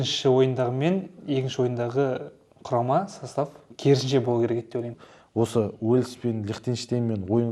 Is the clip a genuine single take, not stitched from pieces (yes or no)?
no